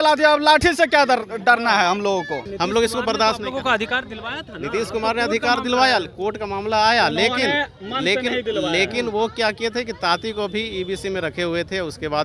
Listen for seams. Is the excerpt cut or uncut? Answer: cut